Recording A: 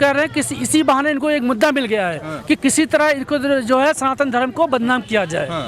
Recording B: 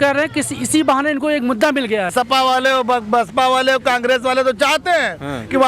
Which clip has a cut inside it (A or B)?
B